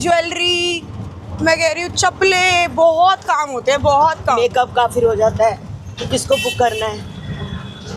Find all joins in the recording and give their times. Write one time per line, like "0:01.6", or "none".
none